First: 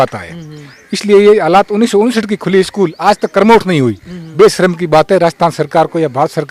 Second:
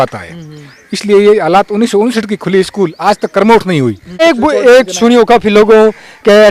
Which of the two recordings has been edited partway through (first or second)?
second